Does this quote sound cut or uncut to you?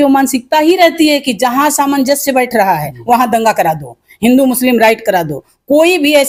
uncut